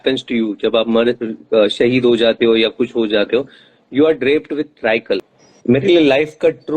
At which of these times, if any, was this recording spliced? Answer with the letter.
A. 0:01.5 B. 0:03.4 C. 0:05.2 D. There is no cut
C